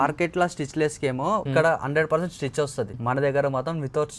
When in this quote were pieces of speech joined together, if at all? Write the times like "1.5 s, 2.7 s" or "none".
1.5 s, 3.0 s